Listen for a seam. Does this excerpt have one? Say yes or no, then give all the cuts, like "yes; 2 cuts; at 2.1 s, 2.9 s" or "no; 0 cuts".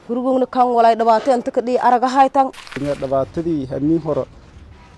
yes; 1 cut; at 2.8 s